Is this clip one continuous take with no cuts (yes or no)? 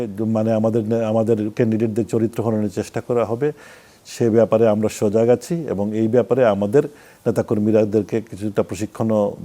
yes